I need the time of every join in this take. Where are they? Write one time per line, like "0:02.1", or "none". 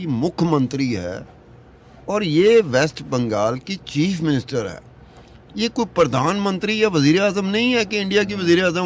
none